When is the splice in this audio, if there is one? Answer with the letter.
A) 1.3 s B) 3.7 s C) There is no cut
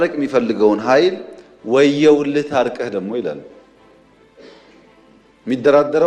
C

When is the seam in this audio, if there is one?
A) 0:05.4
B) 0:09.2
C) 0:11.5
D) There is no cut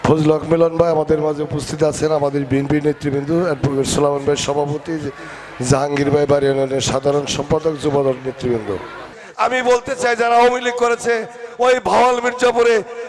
B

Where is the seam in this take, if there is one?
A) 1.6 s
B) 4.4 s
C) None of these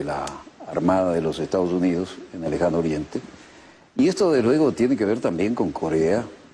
B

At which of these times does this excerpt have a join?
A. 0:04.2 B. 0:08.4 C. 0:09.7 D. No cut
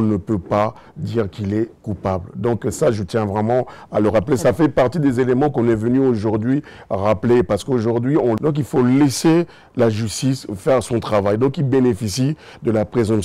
B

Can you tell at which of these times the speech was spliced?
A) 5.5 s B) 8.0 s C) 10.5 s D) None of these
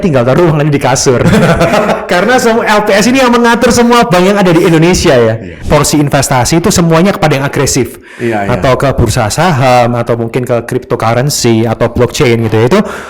A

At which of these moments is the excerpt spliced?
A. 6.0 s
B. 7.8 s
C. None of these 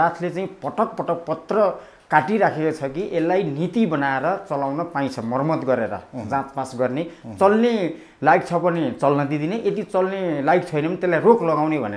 C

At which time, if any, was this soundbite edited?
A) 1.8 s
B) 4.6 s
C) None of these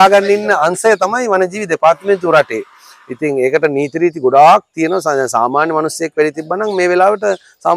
C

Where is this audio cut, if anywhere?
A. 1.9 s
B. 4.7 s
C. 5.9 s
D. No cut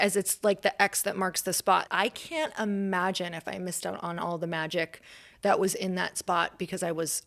A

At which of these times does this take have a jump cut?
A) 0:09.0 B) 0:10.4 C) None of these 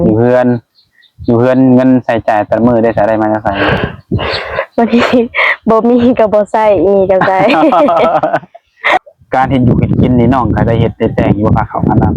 A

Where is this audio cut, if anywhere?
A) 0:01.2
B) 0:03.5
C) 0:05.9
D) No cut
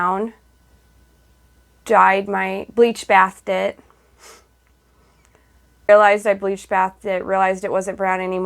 C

